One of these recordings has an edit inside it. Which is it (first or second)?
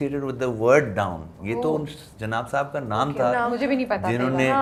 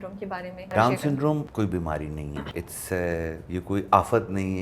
second